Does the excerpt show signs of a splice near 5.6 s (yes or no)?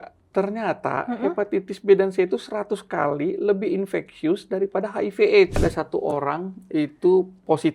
yes